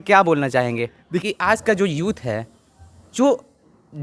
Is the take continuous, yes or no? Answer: no